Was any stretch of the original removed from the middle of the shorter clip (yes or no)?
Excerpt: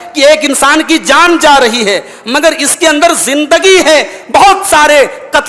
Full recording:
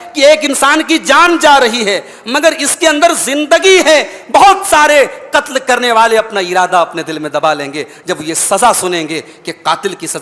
no